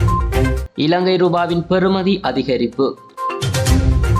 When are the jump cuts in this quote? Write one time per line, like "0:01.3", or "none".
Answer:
0:03.1